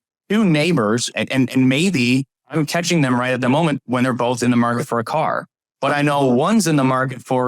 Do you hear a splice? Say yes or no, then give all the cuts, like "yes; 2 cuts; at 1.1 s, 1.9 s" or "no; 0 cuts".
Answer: yes; 2 cuts; at 1.1 s, 2.4 s